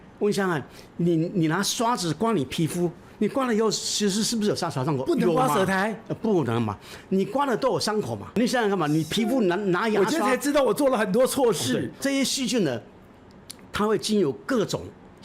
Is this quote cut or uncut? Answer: cut